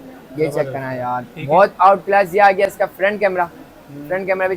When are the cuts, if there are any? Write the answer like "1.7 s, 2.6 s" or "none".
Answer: none